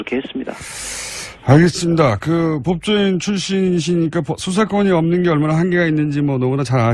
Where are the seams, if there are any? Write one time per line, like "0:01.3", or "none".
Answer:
none